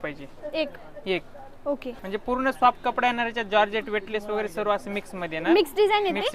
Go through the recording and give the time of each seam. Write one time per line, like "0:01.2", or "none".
none